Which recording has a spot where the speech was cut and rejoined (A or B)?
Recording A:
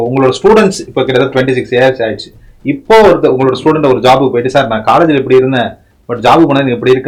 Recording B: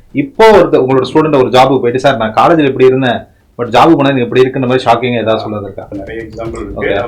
B